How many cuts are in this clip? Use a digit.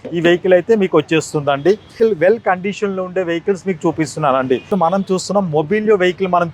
2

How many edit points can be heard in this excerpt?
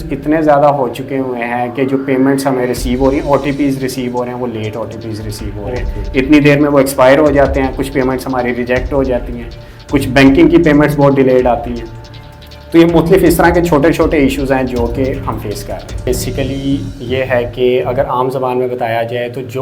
1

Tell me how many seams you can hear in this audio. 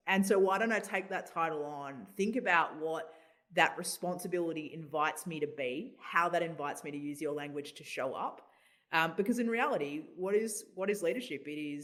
0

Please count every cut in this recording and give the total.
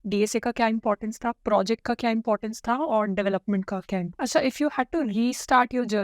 1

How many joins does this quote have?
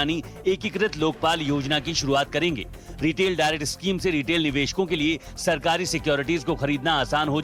0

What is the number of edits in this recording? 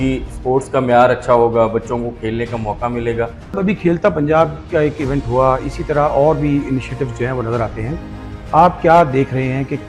1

